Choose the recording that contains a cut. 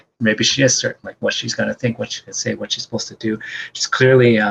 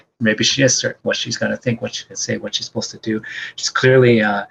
second; 1 cut; at 1.0 s

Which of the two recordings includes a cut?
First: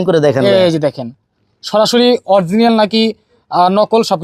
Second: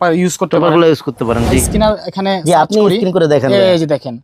second; 1 cut; at 1.6 s

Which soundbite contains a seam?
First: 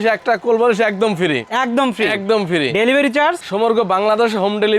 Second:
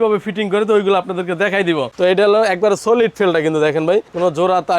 second; 1 cut; at 1.9 s

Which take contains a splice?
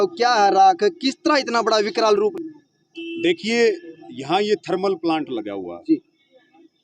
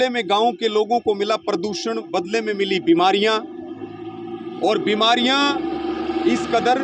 first; 1 cut; at 2.3 s

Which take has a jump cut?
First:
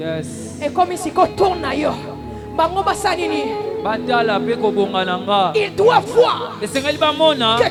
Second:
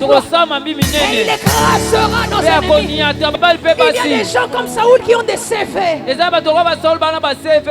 second; 1 cut; at 3.3 s

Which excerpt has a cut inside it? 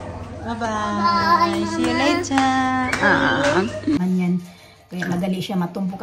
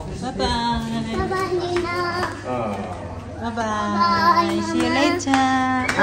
first; 1 cut; at 4.0 s

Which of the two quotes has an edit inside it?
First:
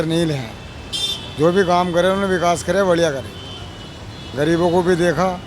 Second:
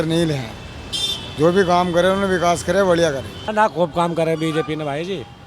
second; 1 cut; at 3.4 s

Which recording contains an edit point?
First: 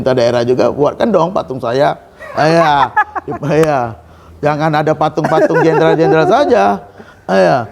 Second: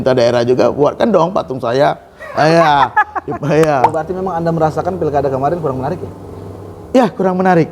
second; 1 cut; at 4.0 s

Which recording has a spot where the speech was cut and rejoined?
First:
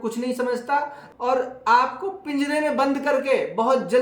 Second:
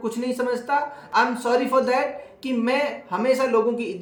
first; 1 cut; at 1.0 s

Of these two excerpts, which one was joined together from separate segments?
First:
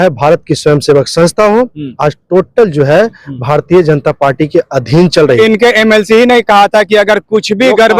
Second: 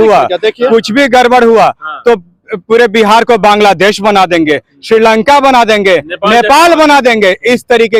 first; 1 cut; at 5.4 s

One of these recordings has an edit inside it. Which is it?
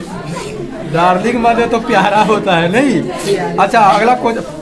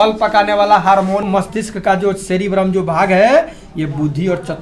second; 1 cut; at 1.2 s

